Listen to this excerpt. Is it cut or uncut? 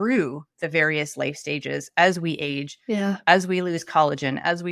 uncut